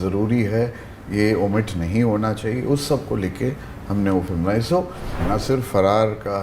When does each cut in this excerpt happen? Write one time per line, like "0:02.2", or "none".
0:05.2